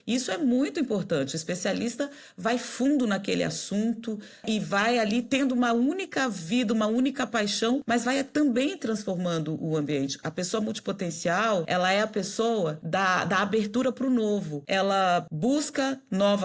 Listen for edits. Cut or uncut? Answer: cut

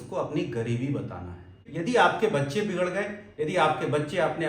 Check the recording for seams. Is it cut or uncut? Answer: cut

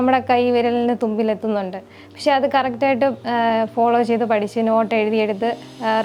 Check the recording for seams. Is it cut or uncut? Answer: uncut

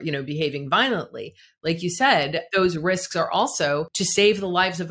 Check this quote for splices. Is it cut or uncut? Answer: cut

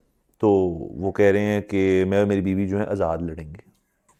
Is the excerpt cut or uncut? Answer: uncut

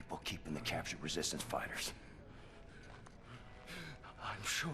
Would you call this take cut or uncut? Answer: uncut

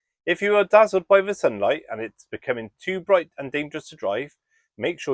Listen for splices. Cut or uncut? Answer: uncut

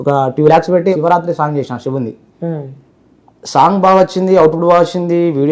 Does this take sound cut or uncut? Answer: cut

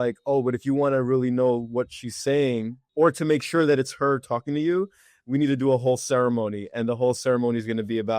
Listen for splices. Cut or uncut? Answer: uncut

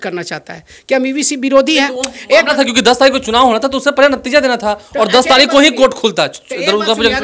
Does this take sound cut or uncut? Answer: uncut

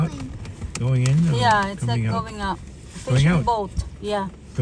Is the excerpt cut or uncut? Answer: uncut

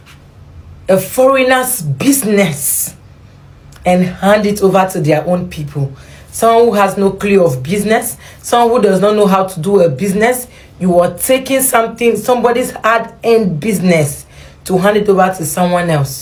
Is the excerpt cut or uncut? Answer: uncut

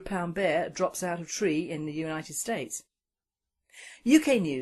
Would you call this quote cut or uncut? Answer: cut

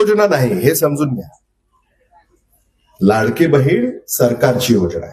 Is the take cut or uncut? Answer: uncut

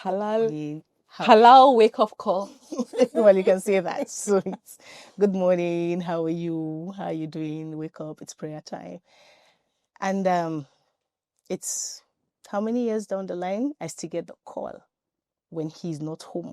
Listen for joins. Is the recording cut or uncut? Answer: uncut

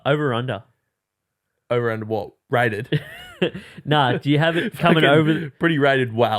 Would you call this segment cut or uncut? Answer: uncut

